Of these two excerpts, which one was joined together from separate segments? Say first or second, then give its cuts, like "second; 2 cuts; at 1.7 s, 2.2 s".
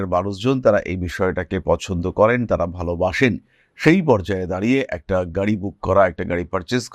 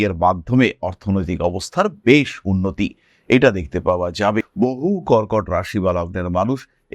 second; 1 cut; at 4.5 s